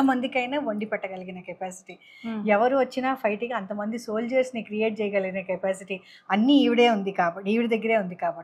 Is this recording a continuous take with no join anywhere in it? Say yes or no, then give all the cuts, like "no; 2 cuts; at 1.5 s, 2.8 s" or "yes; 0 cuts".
yes; 0 cuts